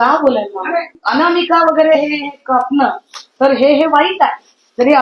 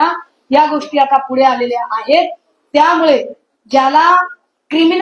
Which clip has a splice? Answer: first; 1 cut; at 1.0 s

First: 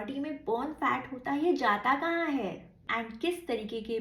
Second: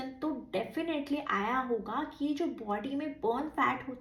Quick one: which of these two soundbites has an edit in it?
first; 1 cut; at 2.9 s

